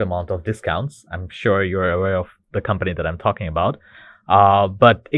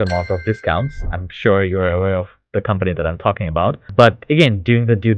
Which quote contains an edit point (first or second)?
second